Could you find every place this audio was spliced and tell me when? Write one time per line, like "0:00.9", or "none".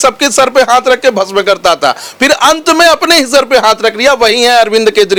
none